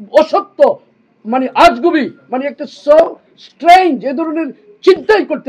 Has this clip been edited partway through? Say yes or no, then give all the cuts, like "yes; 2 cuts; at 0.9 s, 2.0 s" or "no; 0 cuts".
no; 0 cuts